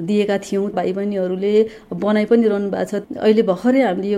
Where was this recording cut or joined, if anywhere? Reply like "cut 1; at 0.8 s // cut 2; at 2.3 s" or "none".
cut 1; at 0.7 s // cut 2; at 3.0 s